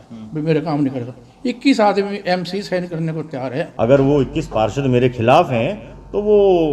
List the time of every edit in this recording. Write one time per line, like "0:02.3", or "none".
0:03.7